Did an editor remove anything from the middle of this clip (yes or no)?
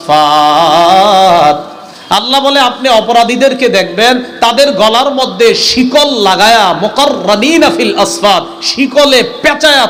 no